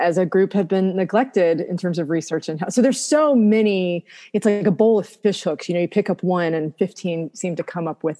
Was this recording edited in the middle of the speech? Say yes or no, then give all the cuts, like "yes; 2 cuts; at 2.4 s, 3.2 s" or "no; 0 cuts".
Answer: no; 0 cuts